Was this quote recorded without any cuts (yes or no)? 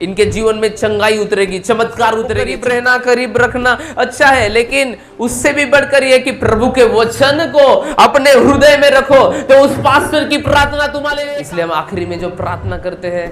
no